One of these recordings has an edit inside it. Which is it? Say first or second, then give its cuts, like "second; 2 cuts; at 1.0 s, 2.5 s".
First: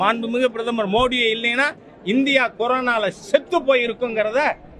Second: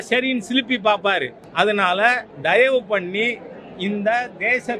second; 2 cuts; at 1.4 s, 2.3 s